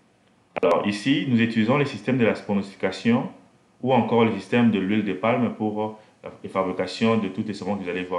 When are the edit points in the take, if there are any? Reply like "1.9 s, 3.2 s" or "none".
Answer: none